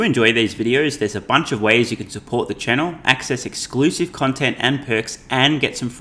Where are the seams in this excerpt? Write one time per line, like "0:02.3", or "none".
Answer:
none